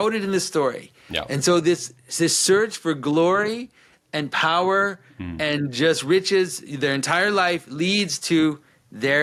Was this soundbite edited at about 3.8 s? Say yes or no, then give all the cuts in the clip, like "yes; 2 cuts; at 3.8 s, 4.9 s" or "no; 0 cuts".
no; 0 cuts